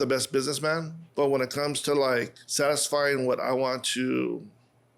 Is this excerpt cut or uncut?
cut